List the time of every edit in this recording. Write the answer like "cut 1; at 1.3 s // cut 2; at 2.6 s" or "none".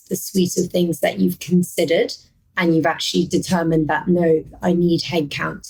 none